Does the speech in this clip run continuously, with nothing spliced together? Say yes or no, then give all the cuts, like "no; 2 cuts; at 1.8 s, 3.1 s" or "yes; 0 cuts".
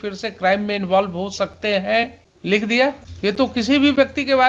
no; 2 cuts; at 2.3 s, 3.1 s